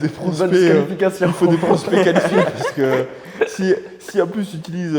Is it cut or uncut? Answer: uncut